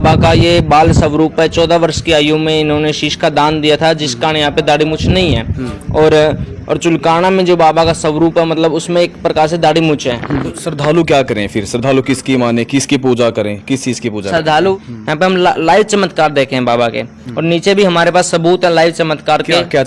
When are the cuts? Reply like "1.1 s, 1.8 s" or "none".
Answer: 10.5 s, 14.7 s